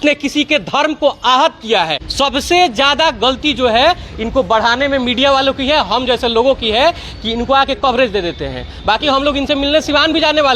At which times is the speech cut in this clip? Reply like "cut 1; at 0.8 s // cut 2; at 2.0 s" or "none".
cut 1; at 2.0 s